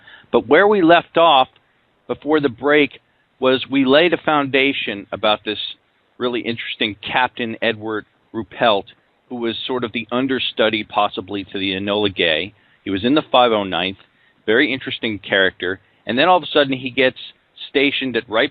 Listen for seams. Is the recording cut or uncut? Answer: cut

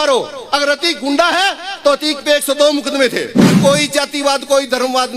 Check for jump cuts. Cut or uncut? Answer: cut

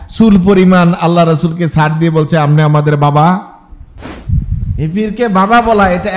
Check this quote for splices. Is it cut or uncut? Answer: cut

